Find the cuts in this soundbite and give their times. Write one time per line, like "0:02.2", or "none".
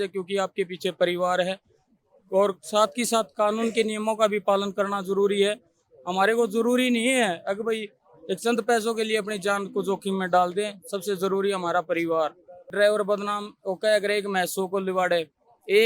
0:12.7